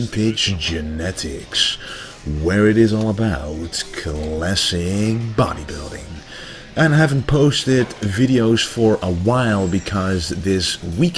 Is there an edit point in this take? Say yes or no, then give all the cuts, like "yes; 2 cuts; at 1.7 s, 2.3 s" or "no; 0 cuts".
no; 0 cuts